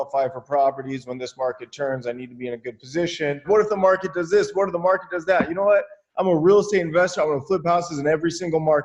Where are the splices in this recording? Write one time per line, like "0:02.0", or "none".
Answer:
0:03.4